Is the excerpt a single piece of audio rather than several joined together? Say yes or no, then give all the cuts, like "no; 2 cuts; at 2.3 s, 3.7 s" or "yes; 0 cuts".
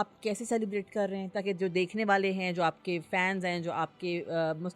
yes; 0 cuts